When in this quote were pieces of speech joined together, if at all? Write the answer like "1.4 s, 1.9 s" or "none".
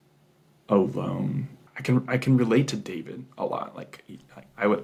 none